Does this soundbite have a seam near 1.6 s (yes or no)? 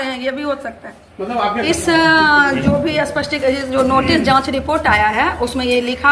yes